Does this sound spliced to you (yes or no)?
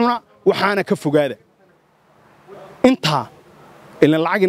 no